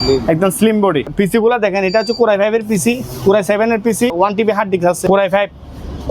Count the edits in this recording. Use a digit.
3